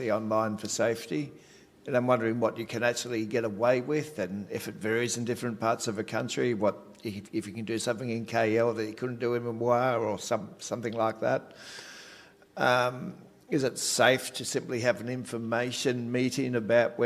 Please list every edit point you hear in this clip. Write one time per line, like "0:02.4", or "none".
none